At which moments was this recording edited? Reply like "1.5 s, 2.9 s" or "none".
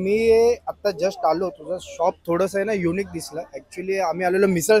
none